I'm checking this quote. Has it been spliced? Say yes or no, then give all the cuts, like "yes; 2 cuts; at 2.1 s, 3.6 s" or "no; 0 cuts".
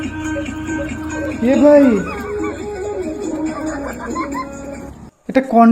no; 0 cuts